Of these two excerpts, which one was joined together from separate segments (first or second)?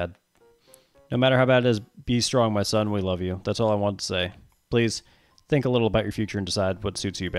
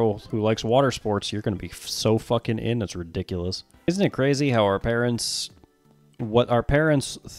second